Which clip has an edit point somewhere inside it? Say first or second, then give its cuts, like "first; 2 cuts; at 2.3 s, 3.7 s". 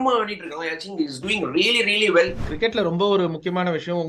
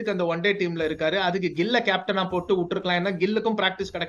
first; 1 cut; at 2.5 s